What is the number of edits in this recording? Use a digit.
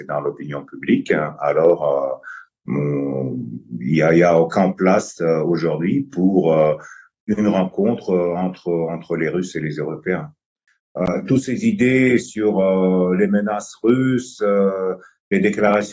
1